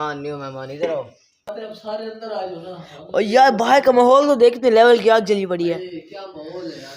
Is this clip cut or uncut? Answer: cut